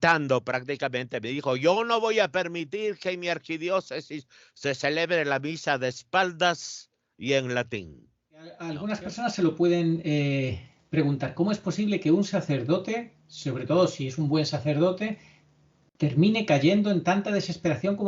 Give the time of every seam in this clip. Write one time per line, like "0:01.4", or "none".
0:08.7